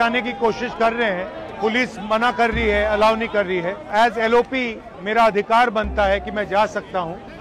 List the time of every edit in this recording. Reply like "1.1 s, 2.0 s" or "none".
none

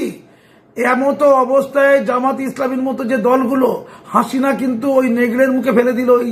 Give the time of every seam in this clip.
none

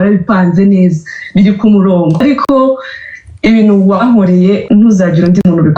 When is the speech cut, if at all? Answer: 2.2 s, 4.6 s

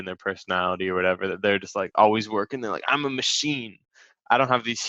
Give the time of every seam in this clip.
none

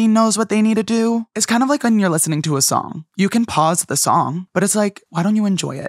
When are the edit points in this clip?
1.3 s, 3.0 s, 4.6 s

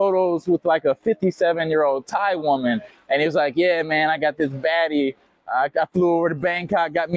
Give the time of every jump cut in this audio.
none

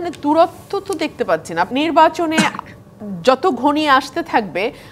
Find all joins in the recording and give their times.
1.7 s

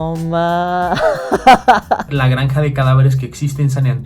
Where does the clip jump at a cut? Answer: 2.1 s

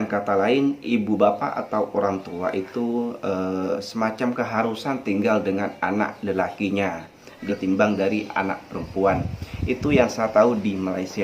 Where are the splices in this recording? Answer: 7.4 s

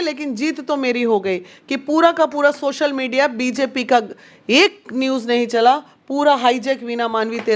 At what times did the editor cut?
none

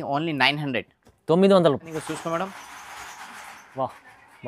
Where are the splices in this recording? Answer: 1.9 s

